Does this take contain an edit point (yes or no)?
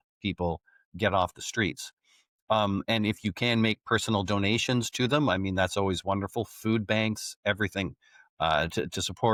no